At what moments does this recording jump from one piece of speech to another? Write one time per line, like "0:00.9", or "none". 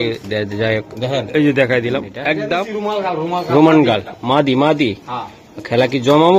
0:02.4